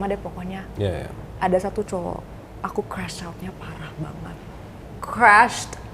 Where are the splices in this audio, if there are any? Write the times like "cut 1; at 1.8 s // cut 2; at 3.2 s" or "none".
cut 1; at 4.9 s